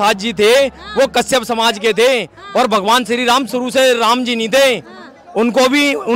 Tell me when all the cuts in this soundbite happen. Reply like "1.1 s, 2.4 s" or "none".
none